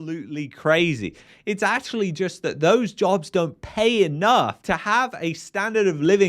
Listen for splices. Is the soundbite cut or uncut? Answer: cut